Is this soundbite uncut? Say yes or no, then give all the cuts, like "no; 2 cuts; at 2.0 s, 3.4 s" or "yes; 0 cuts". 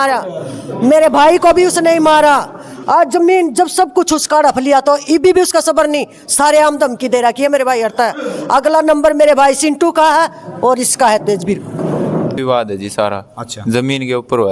no; 1 cut; at 12.4 s